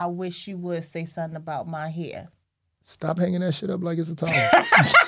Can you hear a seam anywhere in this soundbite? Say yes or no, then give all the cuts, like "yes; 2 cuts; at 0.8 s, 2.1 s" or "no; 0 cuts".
no; 0 cuts